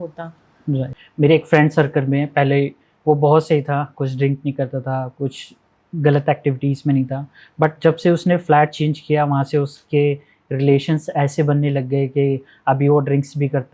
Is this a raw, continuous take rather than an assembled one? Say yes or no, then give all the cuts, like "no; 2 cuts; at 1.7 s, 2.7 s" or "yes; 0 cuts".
no; 1 cut; at 0.9 s